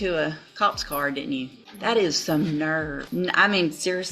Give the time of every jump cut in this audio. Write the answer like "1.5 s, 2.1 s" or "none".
1.6 s, 3.0 s

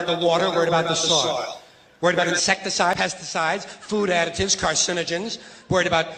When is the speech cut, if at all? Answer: 3.0 s

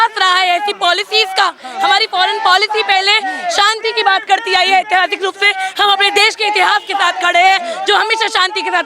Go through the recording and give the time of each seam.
none

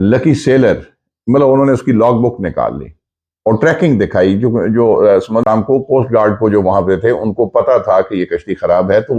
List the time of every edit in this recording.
5.4 s

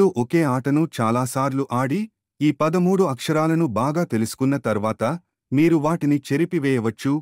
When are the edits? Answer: none

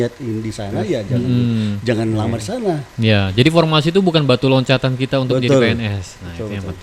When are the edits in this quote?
none

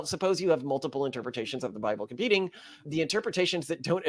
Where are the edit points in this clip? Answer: none

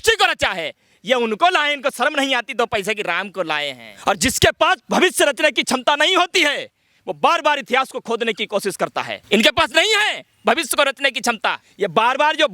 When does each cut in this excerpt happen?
3.8 s, 9.2 s, 11.6 s

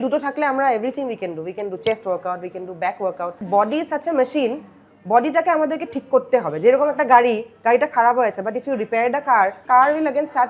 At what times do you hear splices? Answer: 3.4 s, 9.6 s

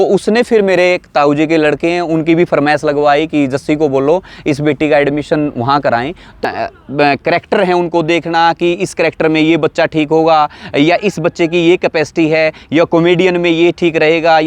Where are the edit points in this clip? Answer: 6.4 s

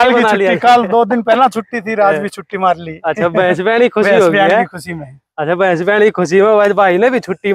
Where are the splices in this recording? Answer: none

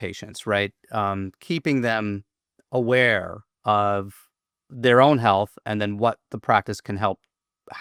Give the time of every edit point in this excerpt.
none

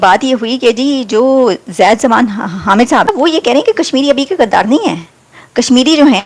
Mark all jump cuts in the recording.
3.1 s

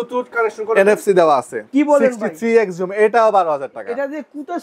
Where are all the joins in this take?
1.7 s

